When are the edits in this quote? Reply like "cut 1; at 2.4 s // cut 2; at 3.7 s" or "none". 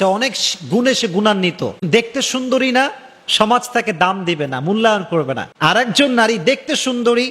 cut 1; at 1.9 s // cut 2; at 5.4 s

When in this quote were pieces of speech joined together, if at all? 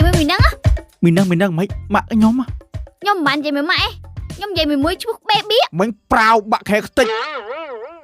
cut 1; at 5.7 s

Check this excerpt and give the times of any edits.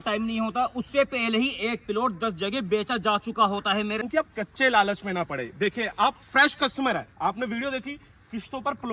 cut 1; at 4.0 s

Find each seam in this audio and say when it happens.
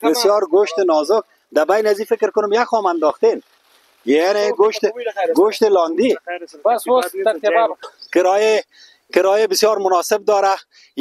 cut 1; at 7.8 s

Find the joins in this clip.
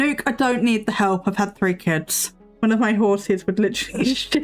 cut 1; at 2.4 s

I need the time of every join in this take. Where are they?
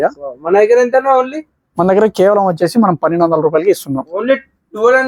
none

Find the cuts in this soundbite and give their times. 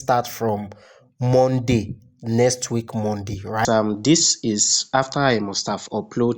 cut 1; at 3.6 s

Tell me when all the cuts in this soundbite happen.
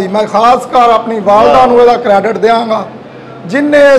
none

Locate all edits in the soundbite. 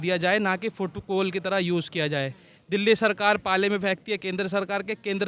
none

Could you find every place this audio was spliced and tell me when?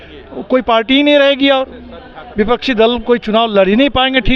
none

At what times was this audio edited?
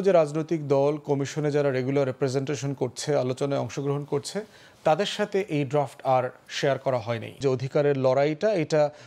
cut 1; at 7.4 s

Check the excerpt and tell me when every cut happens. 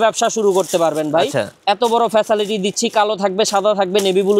none

